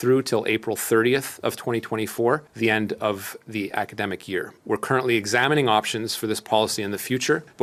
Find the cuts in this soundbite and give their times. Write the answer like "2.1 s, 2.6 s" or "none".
none